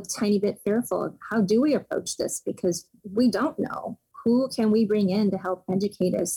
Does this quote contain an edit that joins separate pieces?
no; 0 cuts

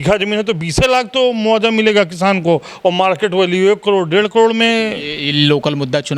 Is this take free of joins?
yes; 0 cuts

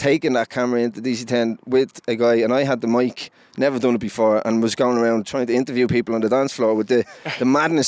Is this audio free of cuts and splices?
yes; 0 cuts

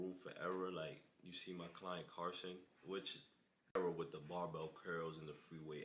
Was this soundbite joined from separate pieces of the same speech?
yes; 1 cut; at 3.7 s

